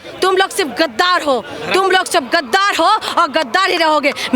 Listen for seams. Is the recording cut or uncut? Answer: uncut